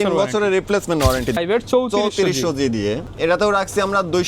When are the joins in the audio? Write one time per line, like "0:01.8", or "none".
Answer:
0:01.4
0:03.1